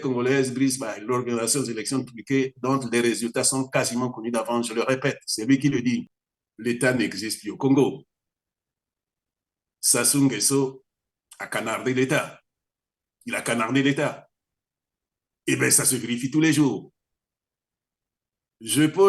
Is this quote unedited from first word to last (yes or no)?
no